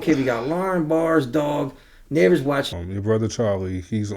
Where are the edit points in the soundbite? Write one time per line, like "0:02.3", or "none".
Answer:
0:02.7